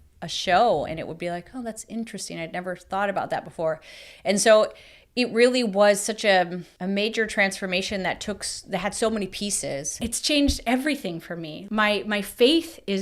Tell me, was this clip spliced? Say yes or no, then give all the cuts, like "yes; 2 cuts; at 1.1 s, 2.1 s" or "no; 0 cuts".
yes; 1 cut; at 9.9 s